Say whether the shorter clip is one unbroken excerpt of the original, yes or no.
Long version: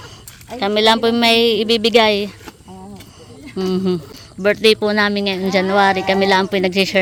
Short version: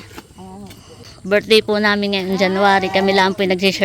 no